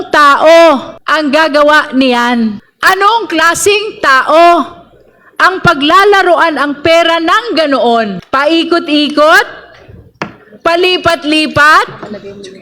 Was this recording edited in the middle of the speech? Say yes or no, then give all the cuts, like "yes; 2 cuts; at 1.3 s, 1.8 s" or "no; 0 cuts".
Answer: yes; 3 cuts; at 1.0 s, 2.7 s, 8.2 s